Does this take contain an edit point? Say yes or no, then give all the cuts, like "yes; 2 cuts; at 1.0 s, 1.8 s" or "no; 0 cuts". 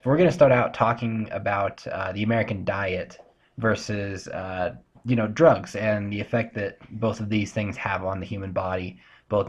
yes; 1 cut; at 2.5 s